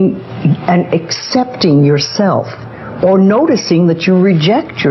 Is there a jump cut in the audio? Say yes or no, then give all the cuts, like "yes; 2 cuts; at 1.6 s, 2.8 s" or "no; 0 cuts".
no; 0 cuts